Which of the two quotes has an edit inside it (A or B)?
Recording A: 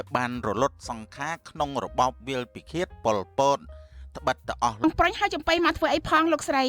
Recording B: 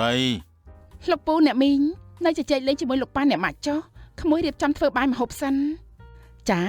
A